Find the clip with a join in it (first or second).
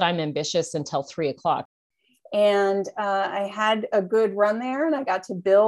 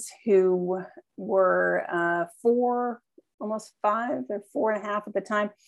first